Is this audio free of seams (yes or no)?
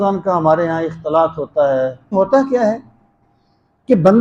no